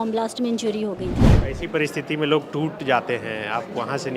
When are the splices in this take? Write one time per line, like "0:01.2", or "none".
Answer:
0:01.3